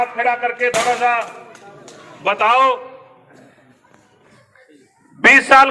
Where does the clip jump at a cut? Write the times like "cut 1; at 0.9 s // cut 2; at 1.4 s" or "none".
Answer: cut 1; at 4.3 s